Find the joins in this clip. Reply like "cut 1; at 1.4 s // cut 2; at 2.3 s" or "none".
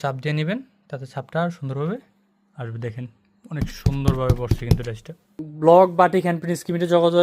cut 1; at 5.4 s

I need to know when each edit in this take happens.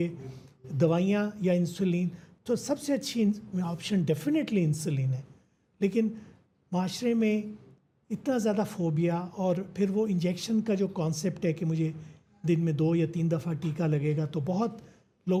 none

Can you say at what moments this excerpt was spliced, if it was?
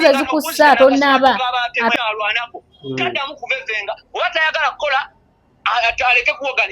cut 1; at 1.9 s

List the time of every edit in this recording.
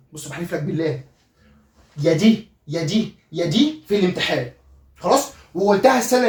none

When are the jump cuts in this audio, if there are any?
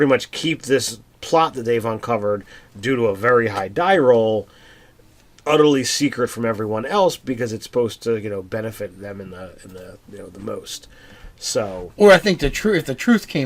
cut 1; at 9.5 s

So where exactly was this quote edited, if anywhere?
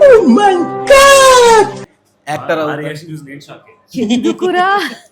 none

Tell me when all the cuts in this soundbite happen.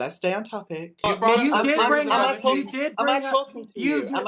cut 1; at 1.1 s

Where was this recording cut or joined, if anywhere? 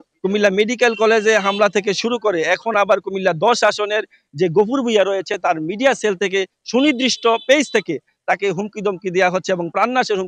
none

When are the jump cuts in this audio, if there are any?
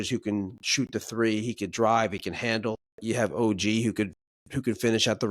cut 1; at 2.9 s

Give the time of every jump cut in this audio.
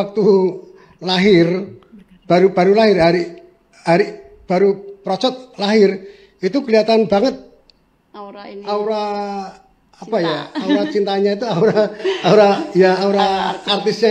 none

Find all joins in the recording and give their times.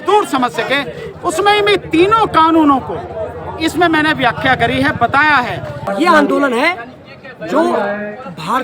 cut 1; at 5.9 s

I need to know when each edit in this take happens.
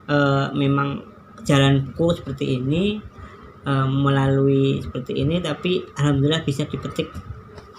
none

